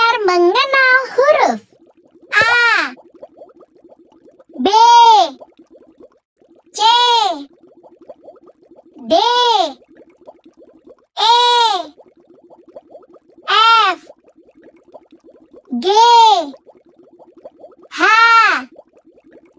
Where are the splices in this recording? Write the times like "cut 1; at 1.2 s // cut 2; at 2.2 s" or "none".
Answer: cut 1; at 7.5 s // cut 2; at 8.9 s // cut 3; at 11.9 s // cut 4; at 13.5 s